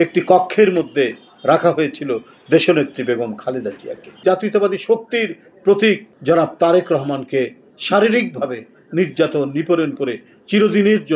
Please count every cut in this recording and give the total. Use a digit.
2